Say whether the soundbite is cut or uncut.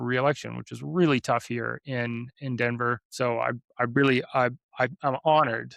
cut